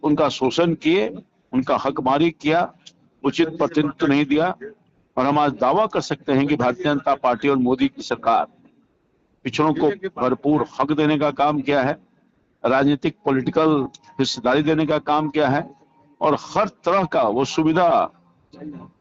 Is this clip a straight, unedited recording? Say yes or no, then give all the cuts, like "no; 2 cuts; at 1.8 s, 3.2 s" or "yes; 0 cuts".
yes; 0 cuts